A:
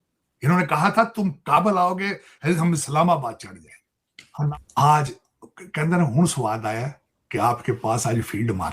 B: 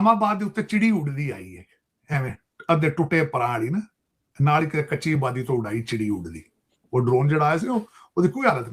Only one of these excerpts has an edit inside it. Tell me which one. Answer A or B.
A